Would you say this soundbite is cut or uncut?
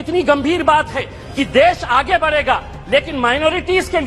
uncut